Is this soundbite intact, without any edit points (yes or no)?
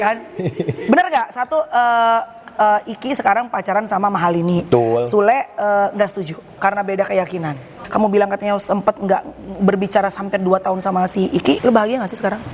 no